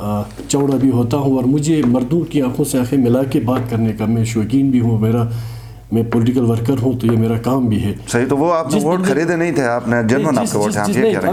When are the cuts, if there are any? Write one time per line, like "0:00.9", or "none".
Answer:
none